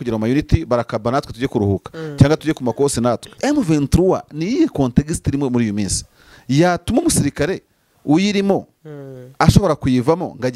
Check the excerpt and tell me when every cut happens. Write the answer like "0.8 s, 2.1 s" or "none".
3.3 s